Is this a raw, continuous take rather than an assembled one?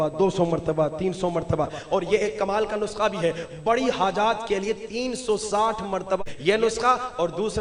no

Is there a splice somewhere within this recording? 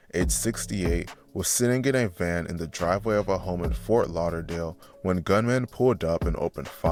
no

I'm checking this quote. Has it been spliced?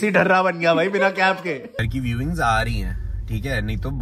yes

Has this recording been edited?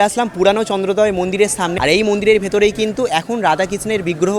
yes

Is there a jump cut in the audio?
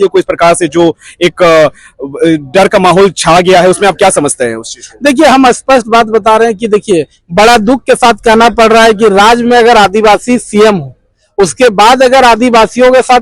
no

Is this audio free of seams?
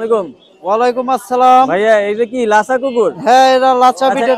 yes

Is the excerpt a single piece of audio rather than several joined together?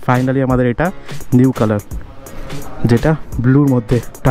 yes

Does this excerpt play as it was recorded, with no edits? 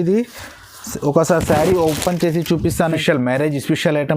no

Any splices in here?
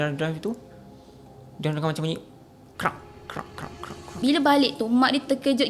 yes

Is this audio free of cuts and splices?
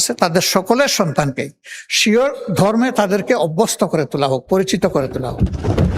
yes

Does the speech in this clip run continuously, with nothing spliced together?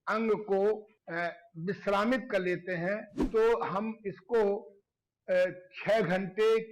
no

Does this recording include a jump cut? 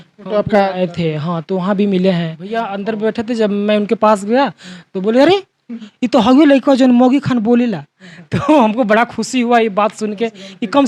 yes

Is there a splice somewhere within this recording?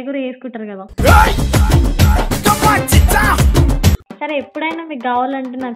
yes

